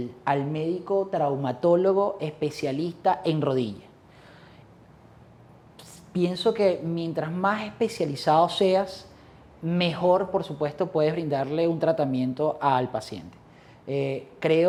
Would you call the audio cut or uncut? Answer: uncut